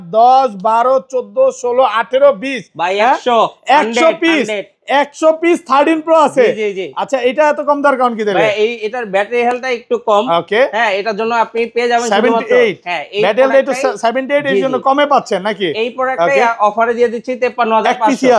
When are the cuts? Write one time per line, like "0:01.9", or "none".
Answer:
none